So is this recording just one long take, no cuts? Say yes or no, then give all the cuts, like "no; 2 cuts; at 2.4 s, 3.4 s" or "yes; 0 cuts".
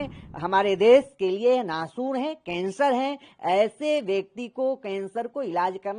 yes; 0 cuts